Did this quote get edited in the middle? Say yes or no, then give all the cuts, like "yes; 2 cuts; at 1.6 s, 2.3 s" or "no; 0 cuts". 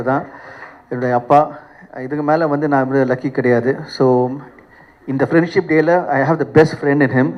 no; 0 cuts